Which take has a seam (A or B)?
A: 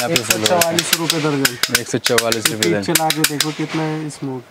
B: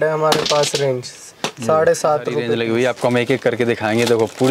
B